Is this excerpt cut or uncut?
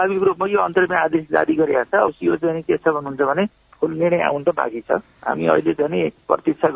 uncut